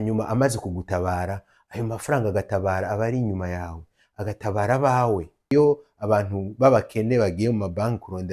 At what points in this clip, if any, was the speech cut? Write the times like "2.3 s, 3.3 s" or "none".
5.5 s